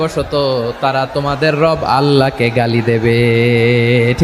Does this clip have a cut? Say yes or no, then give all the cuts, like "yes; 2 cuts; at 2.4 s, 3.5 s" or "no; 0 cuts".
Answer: no; 0 cuts